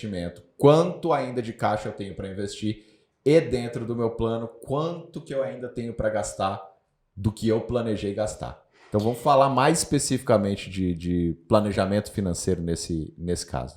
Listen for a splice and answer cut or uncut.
uncut